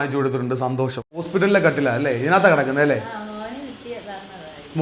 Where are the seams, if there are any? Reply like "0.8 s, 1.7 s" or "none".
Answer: 1.2 s